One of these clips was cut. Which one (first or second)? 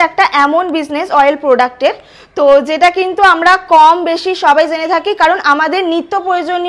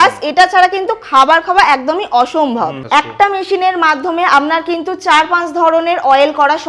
second